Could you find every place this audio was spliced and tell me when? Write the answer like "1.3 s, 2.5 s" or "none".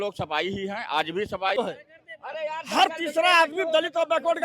1.6 s